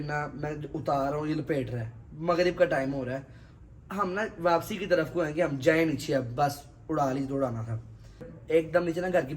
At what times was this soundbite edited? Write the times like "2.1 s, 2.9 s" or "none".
8.4 s